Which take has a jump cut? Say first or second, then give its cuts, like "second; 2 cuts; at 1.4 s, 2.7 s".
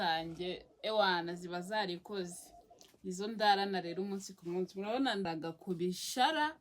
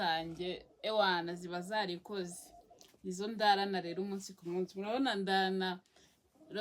first; 1 cut; at 5.3 s